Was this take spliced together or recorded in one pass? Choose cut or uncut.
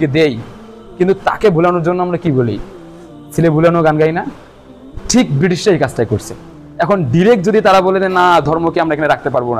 uncut